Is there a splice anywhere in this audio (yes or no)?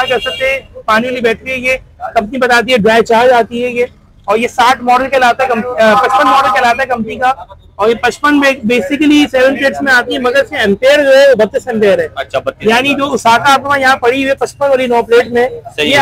no